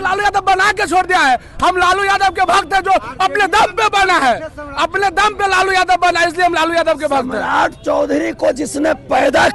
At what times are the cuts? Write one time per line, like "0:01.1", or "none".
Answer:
none